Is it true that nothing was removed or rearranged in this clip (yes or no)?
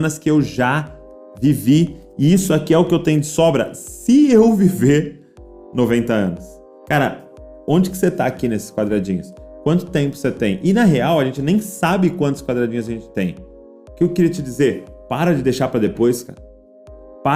yes